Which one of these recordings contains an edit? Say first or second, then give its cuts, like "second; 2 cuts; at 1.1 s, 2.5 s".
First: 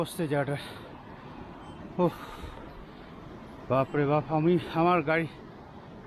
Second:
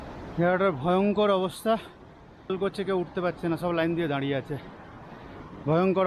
second; 1 cut; at 2.5 s